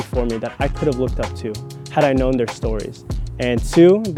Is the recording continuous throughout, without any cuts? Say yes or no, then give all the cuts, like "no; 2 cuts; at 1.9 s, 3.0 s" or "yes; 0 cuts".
yes; 0 cuts